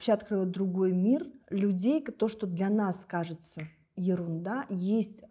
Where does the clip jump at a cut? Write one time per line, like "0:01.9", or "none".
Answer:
0:01.4

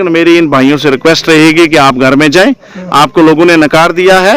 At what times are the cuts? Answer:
none

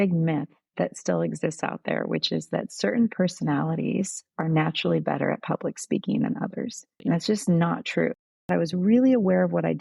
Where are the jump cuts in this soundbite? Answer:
0:06.9
0:08.4

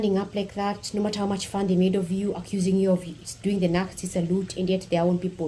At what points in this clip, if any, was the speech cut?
none

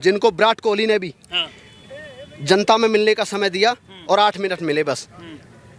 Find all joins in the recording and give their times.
none

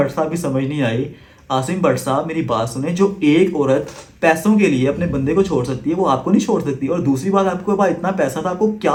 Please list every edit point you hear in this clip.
none

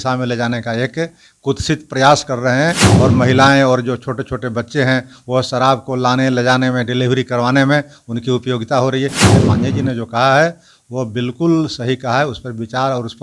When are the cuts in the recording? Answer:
0:02.9
0:09.2

